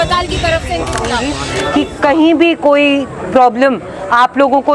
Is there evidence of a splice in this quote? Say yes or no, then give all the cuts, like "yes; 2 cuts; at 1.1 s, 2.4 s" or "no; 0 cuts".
yes; 1 cut; at 1.5 s